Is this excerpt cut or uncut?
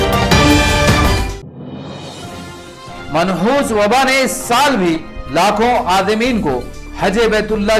uncut